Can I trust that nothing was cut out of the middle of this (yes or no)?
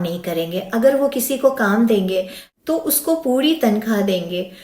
no